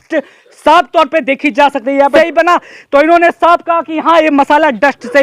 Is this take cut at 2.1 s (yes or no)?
yes